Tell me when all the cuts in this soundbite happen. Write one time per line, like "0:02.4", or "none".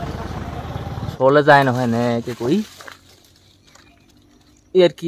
0:01.1